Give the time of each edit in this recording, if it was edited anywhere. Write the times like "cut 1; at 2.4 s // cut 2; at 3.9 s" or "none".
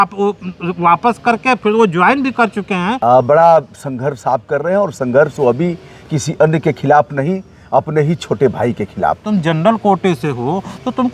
cut 1; at 3.0 s // cut 2; at 9.2 s